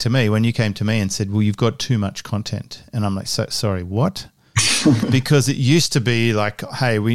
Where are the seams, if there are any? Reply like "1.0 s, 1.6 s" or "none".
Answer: none